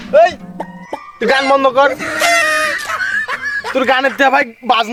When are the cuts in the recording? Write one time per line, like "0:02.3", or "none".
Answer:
none